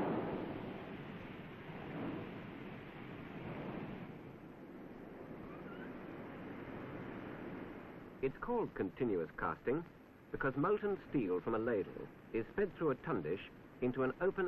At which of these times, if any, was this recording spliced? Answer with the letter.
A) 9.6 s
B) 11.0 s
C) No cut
B